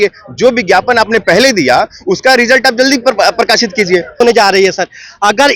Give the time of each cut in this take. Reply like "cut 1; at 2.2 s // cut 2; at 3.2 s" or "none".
cut 1; at 4.2 s